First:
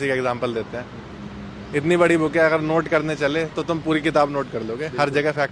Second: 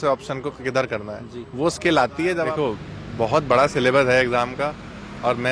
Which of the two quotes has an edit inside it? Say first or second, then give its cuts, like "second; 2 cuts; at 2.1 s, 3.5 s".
second; 1 cut; at 2.5 s